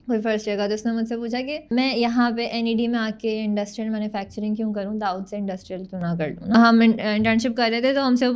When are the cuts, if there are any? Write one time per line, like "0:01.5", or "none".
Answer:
0:01.6
0:06.5